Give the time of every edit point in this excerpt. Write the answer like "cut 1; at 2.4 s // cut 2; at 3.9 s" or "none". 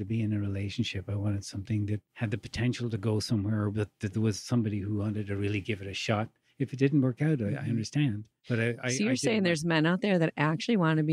none